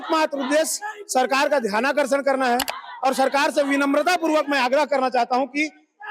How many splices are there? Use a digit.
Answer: 0